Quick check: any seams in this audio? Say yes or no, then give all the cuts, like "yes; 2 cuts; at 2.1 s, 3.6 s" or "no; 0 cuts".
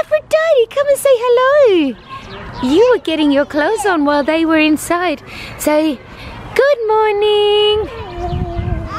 no; 0 cuts